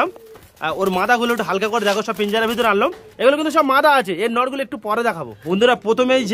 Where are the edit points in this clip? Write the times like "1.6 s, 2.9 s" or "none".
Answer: 5.3 s